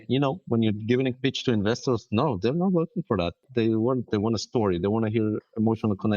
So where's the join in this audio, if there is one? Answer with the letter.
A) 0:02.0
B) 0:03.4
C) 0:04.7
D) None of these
B